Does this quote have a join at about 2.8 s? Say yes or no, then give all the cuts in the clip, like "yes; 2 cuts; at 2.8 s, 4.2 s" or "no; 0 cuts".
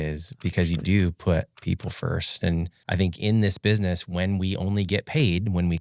yes; 1 cut; at 2.8 s